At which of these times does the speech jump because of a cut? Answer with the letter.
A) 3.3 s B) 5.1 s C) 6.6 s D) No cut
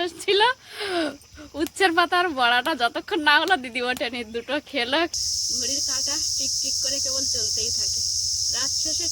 B